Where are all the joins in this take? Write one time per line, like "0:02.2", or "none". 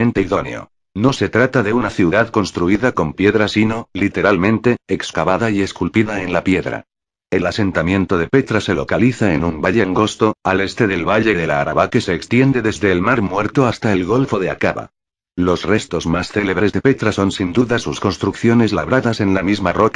0:02.8